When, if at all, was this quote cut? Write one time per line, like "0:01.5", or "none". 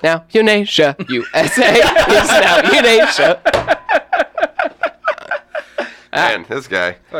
none